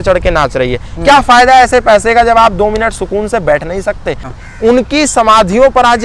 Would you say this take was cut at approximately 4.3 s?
yes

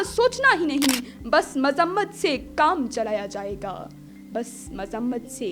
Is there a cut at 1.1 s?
no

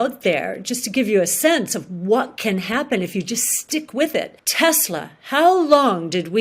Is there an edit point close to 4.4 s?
yes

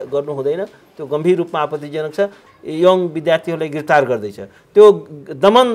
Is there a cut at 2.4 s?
yes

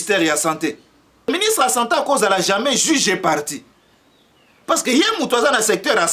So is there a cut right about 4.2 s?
no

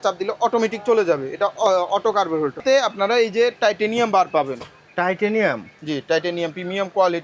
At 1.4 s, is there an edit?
no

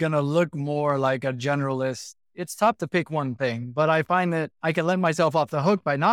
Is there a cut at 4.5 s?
yes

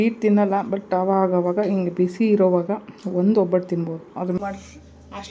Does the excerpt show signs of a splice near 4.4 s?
yes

